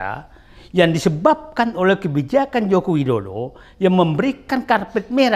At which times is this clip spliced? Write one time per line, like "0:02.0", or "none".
none